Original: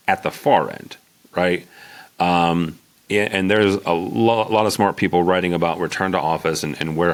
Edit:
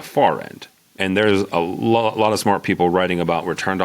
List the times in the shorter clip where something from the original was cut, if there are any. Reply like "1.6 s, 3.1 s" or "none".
1.0 s